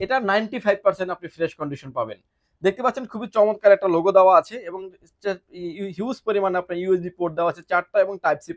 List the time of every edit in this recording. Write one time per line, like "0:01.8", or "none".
none